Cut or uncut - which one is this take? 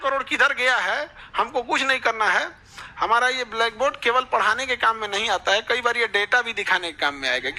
uncut